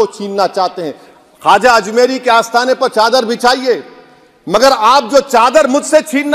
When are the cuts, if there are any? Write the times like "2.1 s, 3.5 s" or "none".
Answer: none